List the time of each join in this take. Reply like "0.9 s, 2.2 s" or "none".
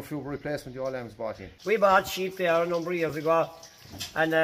1.5 s